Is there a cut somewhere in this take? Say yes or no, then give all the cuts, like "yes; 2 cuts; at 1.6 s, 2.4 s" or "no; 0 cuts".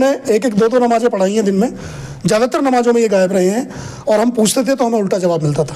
no; 0 cuts